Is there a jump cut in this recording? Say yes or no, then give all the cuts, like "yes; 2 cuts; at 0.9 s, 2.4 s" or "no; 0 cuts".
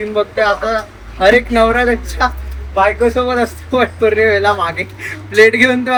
no; 0 cuts